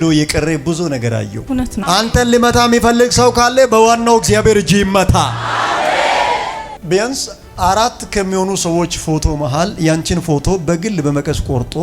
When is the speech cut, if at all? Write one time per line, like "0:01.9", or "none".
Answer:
0:01.8
0:06.7